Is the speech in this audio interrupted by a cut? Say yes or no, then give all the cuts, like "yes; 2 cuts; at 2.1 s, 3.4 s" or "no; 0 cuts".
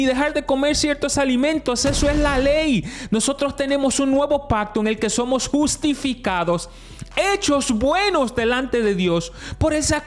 no; 0 cuts